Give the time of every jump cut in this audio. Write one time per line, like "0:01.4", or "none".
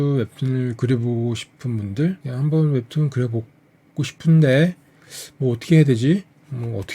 0:02.3